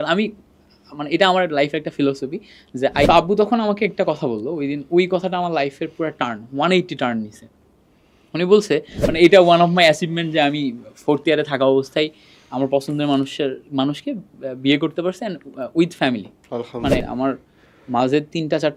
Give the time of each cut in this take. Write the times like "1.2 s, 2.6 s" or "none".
3.1 s, 9.0 s, 17.0 s